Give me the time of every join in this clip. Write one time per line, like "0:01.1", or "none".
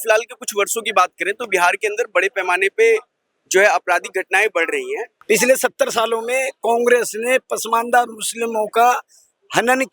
0:05.1